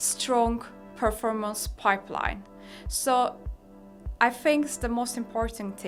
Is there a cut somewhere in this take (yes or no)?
no